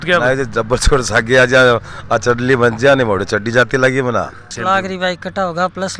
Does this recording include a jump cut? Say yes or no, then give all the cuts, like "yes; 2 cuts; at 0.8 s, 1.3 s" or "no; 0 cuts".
yes; 1 cut; at 4.5 s